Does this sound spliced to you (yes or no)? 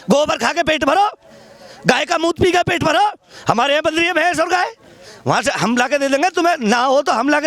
no